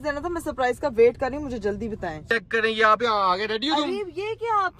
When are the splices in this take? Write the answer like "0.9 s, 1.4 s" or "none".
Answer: 2.2 s